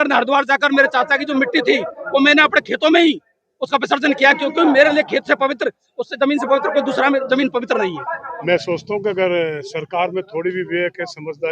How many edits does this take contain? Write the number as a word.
one